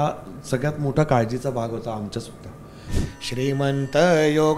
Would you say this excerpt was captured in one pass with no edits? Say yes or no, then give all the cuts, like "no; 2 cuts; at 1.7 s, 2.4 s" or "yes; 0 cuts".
no; 1 cut; at 2.9 s